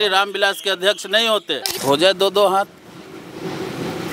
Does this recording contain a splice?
yes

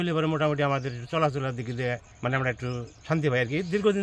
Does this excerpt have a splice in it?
yes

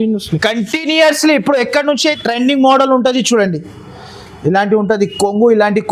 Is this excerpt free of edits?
no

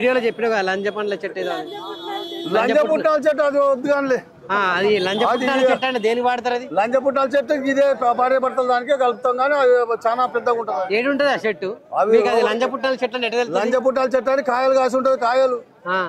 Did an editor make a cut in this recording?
no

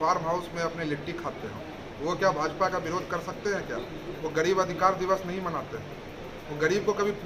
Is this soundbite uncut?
yes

